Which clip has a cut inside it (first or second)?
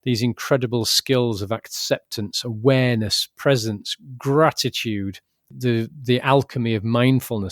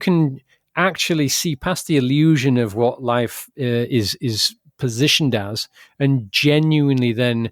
first